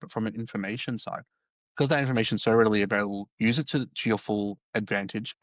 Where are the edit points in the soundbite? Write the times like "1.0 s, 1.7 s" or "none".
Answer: 1.1 s